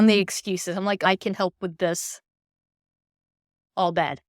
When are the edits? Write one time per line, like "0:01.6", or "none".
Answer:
0:01.0

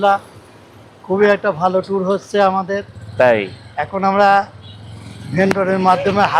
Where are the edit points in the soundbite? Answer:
none

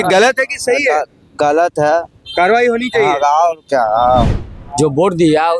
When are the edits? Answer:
0:04.4

